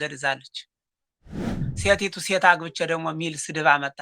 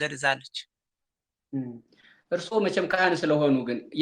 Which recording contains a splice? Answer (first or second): first